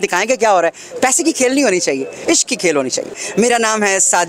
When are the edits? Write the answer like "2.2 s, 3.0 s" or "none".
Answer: 3.1 s